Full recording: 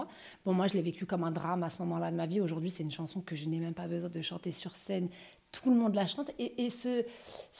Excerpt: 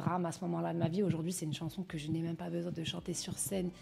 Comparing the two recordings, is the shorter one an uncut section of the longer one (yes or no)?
yes